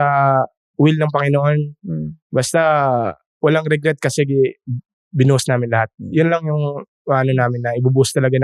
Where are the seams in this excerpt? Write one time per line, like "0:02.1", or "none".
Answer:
none